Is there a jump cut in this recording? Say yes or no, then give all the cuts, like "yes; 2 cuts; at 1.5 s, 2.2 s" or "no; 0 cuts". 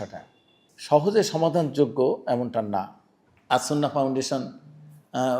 no; 0 cuts